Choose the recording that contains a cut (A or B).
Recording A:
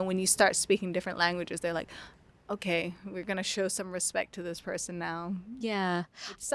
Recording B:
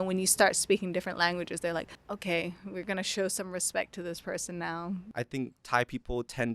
B